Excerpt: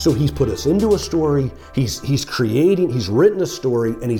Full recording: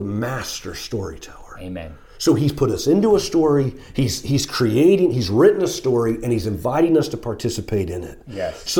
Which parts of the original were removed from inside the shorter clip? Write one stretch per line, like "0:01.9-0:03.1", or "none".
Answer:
none